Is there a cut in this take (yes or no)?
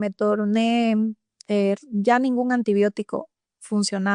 no